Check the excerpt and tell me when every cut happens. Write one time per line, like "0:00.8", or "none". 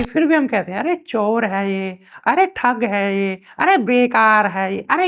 none